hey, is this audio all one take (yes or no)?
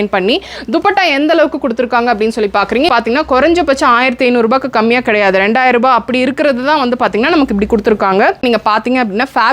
no